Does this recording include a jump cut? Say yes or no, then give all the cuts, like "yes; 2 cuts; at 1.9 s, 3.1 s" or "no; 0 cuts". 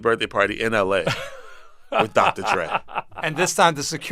no; 0 cuts